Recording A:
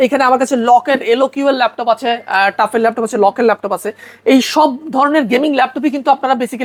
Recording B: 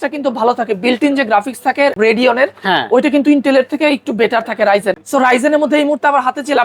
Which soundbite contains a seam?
B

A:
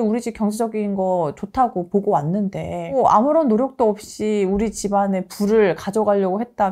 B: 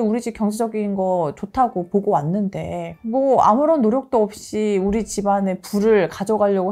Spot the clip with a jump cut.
A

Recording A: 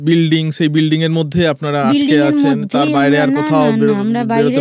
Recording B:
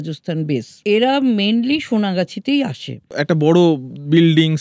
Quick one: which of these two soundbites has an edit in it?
B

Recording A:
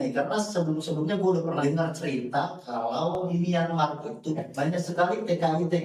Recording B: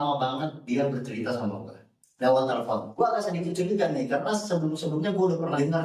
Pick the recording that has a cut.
B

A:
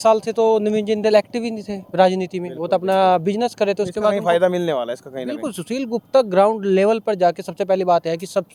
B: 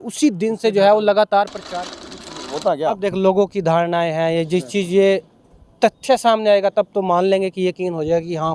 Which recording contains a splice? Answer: B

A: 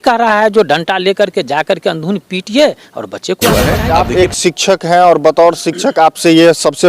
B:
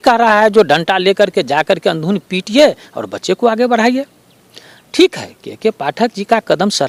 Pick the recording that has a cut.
A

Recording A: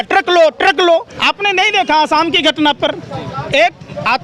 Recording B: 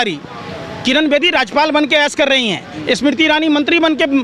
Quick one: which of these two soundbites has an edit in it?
A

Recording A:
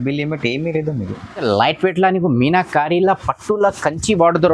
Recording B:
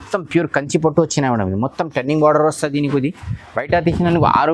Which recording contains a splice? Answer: A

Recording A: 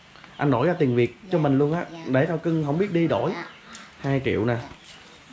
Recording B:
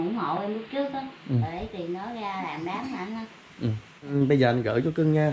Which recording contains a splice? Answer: B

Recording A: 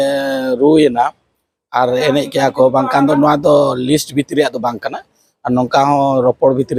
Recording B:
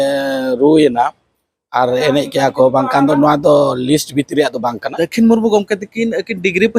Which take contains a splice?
B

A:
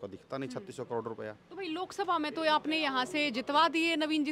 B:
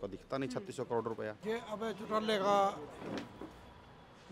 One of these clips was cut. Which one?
B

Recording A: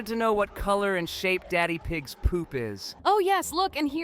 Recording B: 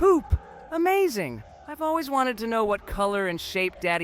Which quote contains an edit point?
A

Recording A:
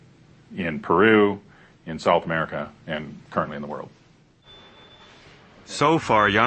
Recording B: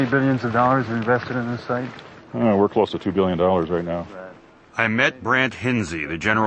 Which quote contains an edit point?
B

